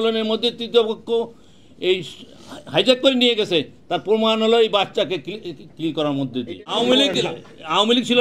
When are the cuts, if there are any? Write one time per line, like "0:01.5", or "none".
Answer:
0:06.6

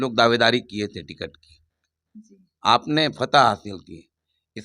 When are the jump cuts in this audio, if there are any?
none

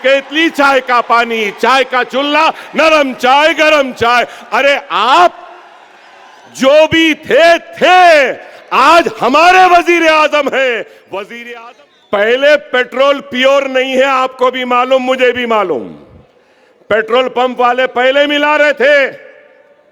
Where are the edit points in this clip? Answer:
0:11.3

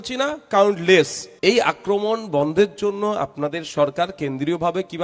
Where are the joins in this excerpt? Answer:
0:01.2

